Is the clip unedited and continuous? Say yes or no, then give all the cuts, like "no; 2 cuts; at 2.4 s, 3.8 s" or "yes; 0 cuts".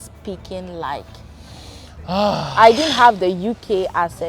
yes; 0 cuts